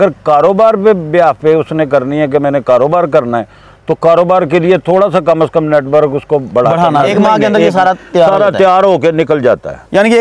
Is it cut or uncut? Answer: cut